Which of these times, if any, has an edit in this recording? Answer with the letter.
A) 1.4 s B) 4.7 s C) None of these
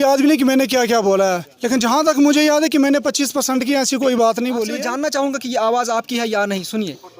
B